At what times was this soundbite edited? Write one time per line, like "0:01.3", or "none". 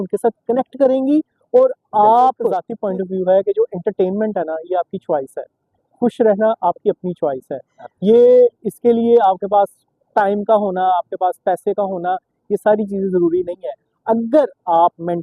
0:02.7